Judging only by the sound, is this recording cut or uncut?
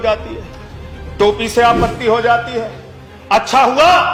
uncut